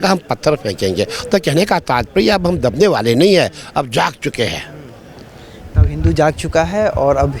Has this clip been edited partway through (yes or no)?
no